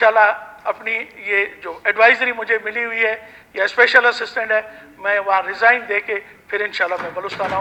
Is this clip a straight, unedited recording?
yes; 0 cuts

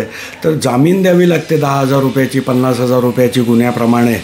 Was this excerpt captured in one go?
yes; 0 cuts

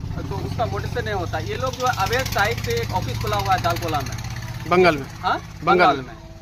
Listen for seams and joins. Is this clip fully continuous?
yes; 0 cuts

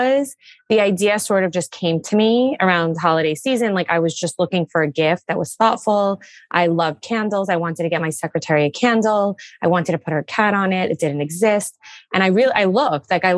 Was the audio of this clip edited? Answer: no; 0 cuts

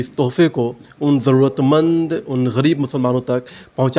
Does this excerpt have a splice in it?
no; 0 cuts

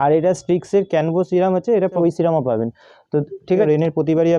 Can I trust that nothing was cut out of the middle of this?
no; 2 cuts; at 2.0 s, 3.7 s

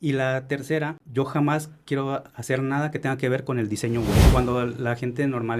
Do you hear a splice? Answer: yes; 2 cuts; at 1.0 s, 4.3 s

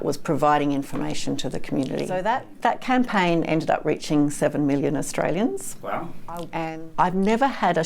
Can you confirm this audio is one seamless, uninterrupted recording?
no; 2 cuts; at 2.2 s, 6.5 s

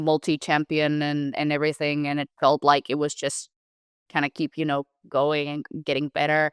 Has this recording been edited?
no; 0 cuts

